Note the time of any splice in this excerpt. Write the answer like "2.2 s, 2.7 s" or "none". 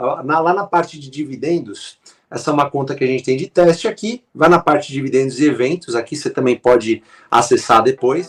none